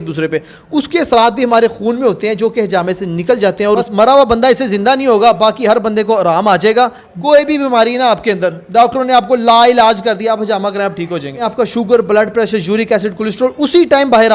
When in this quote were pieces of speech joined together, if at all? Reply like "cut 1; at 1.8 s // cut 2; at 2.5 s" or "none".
cut 1; at 3.6 s // cut 2; at 7.1 s // cut 3; at 11.4 s